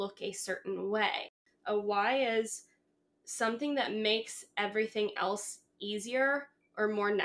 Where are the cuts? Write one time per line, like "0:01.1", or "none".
0:01.3